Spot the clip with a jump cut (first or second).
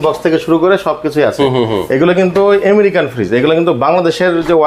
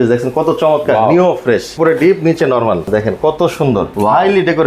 second